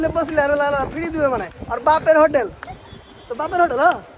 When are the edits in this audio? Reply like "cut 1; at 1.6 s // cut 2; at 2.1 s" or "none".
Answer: none